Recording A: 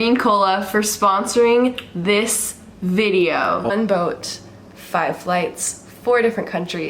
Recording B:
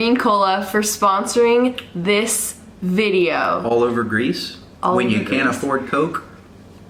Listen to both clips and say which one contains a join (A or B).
A